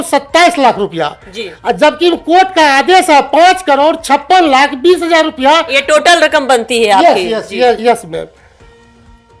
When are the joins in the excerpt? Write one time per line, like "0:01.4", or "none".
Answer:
none

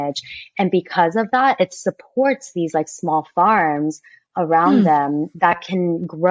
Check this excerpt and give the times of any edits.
none

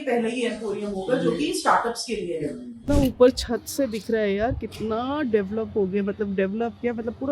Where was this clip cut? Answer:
0:02.8

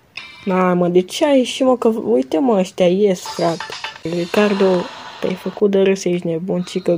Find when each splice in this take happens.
0:04.0

